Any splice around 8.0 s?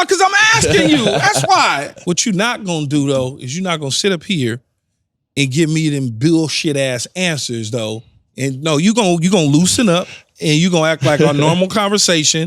no; 1 cut; at 1.9 s

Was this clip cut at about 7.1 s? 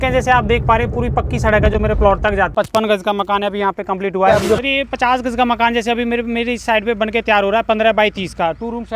no; 1 cut; at 2.5 s

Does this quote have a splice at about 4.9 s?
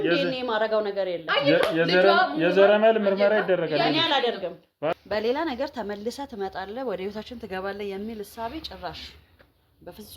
yes; 1 cut; at 4.9 s

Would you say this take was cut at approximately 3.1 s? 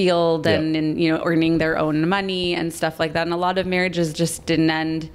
no; 0 cuts

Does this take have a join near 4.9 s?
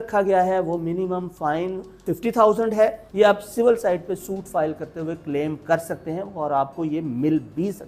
no; 1 cut; at 3.0 s

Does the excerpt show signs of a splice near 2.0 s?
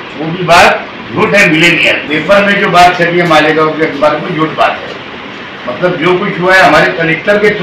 yes; 1 cut; at 2.0 s

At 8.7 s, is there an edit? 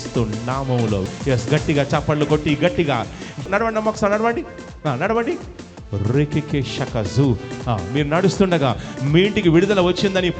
no; 2 cuts; at 1.0 s, 3.5 s

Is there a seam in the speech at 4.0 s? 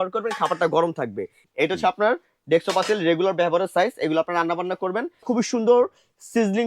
no; 2 cuts; at 1.4 s, 5.2 s

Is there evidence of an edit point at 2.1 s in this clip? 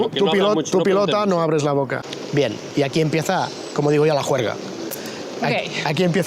yes; 1 cut; at 2.1 s

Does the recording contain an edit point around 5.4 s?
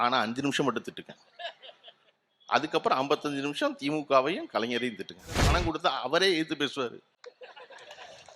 yes; 1 cut; at 5.4 s

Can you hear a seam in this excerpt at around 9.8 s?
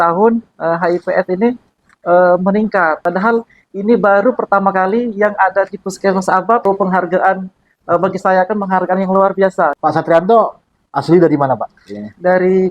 yes; 3 cuts; at 3.0 s, 6.6 s, 9.8 s

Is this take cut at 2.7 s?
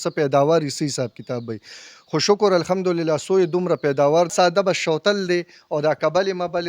no; 1 cut; at 4.3 s

